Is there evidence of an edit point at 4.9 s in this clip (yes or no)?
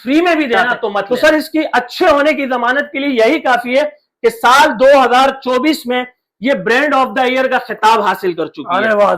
no